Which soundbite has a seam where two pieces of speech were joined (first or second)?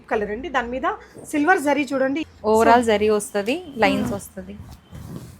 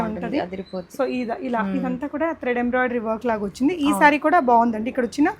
first